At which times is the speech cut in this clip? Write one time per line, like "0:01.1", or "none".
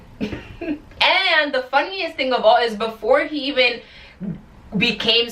0:00.9